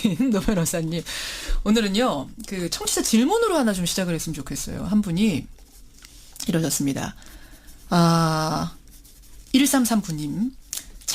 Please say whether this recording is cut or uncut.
cut